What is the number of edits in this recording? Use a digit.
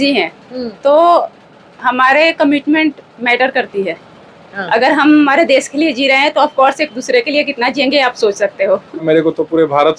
1